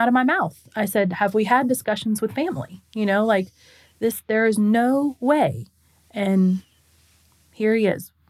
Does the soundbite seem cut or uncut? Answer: uncut